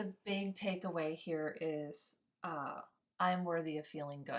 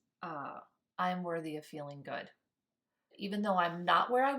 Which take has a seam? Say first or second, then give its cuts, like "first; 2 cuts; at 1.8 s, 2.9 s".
second; 1 cut; at 3.1 s